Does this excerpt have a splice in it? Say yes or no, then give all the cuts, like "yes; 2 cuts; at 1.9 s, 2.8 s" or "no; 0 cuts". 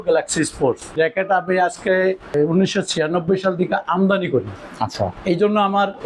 yes; 3 cuts; at 0.9 s, 2.3 s, 4.6 s